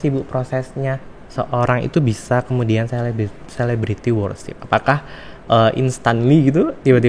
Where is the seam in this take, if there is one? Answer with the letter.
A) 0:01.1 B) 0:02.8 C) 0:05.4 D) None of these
A